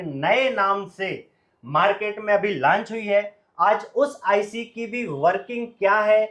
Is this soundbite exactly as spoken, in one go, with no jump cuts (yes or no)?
yes